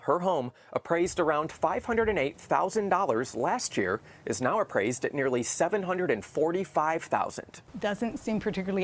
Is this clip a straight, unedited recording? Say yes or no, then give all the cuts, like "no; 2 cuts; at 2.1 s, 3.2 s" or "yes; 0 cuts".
yes; 0 cuts